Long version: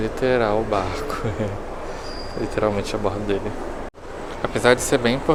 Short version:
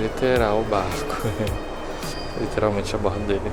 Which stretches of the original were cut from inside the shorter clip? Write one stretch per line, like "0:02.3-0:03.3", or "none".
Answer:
none